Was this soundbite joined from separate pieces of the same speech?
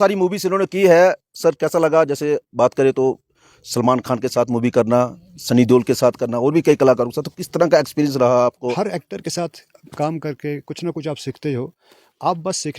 yes; 1 cut; at 8.7 s

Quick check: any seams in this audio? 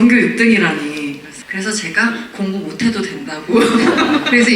yes; 1 cut; at 1.4 s

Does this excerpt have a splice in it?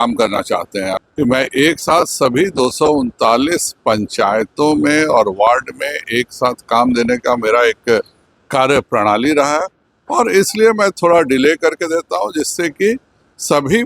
yes; 1 cut; at 1.0 s

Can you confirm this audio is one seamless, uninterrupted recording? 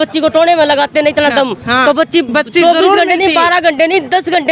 yes; 0 cuts

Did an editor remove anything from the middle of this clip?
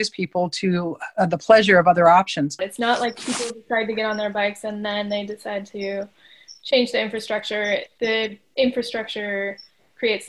yes; 2 cuts; at 2.7 s, 7.9 s

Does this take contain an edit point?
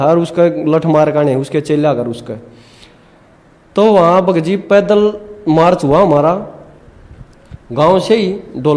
no; 0 cuts

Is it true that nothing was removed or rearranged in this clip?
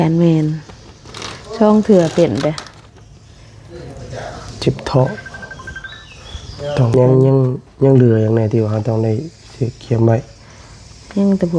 no; 1 cut; at 6.9 s

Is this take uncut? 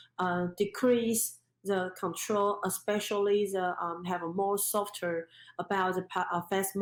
yes; 0 cuts

